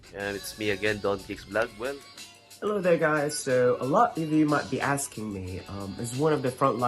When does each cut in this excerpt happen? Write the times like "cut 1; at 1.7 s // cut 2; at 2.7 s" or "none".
cut 1; at 2.0 s